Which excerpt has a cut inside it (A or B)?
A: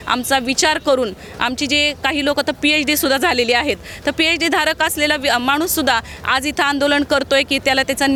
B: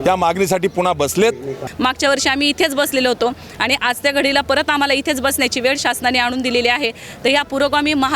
B